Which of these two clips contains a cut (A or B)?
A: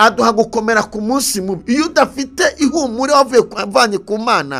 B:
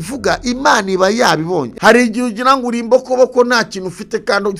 B